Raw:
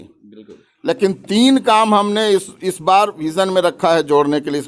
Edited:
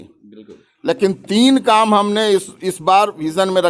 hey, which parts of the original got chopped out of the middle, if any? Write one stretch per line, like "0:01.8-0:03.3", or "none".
none